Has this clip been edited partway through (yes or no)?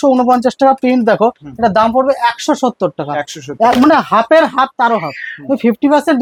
no